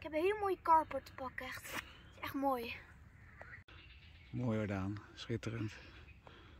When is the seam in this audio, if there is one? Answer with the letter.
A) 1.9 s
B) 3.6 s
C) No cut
B